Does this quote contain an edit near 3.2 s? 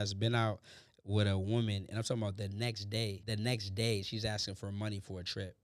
yes; 1 cut; at 3.2 s

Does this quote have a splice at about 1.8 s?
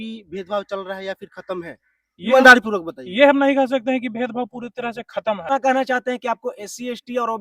no; 1 cut; at 5.5 s

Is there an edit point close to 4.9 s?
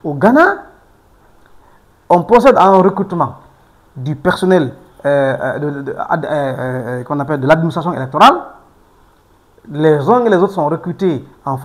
no; 0 cuts

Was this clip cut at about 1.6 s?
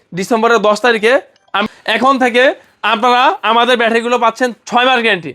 yes; 1 cut; at 1.6 s

